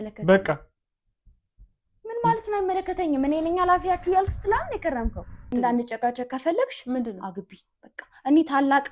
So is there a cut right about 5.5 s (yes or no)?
yes